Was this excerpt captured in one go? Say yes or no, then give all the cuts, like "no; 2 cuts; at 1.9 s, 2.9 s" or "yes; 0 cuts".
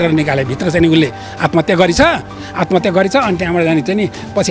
yes; 0 cuts